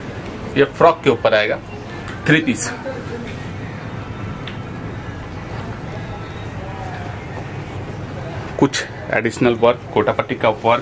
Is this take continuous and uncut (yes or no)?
yes